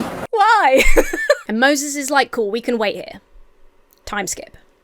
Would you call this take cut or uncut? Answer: cut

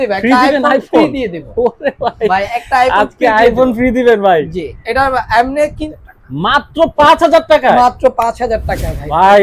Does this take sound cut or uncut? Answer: cut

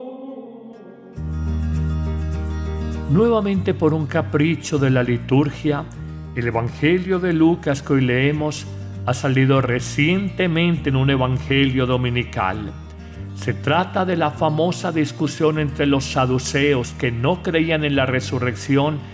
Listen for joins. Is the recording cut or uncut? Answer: cut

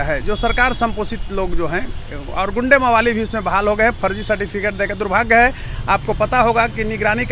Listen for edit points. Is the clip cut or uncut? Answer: uncut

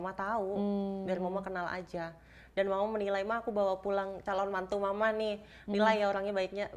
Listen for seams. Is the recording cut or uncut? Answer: cut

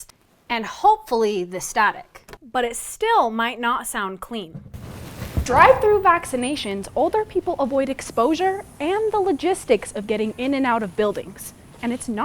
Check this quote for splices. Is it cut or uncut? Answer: cut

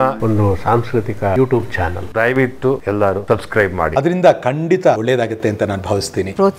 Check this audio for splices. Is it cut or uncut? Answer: uncut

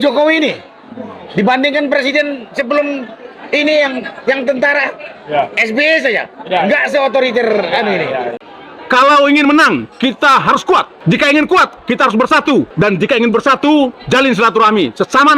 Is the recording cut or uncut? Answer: cut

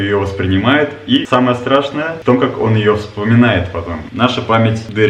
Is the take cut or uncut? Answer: cut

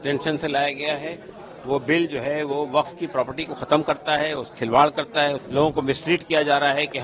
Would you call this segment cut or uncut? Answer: cut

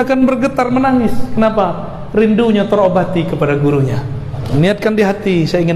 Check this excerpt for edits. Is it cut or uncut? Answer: cut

